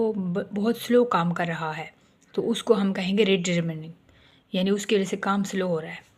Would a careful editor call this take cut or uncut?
uncut